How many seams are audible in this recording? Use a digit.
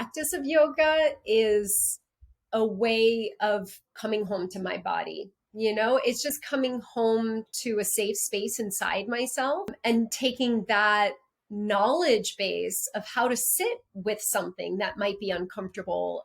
1